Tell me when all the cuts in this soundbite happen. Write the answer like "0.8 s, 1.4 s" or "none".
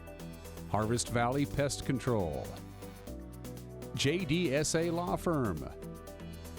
5.7 s